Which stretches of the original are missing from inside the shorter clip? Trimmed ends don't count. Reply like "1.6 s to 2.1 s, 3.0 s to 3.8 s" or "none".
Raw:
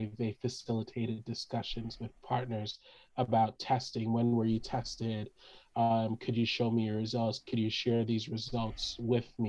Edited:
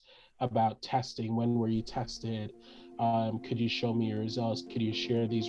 none